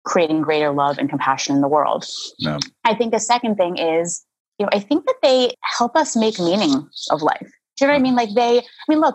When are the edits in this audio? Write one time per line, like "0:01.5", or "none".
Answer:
0:05.6